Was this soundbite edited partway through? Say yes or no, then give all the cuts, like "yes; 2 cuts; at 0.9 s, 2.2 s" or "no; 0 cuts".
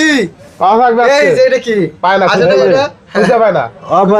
no; 0 cuts